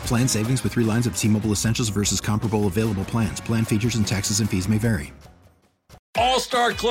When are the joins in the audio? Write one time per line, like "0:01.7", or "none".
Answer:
0:06.0

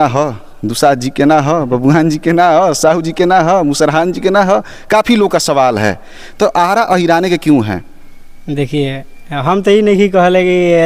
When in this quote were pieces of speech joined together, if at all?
none

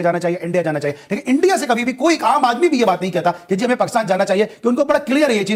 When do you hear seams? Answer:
none

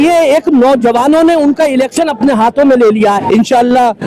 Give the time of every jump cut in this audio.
0:03.1

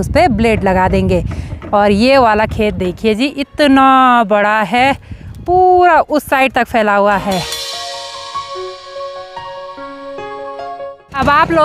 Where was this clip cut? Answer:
none

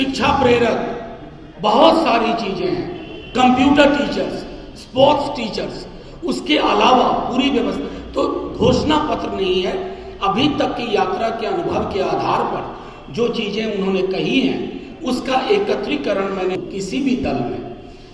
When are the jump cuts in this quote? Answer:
0:16.6

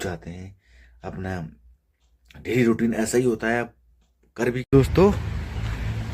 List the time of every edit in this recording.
0:04.6

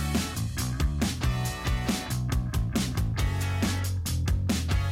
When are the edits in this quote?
0:02.4

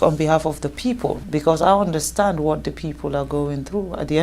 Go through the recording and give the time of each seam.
0:01.2

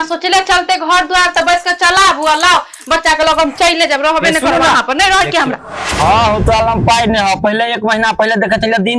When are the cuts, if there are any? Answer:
0:05.5

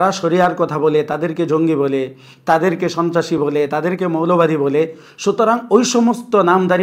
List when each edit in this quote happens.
none

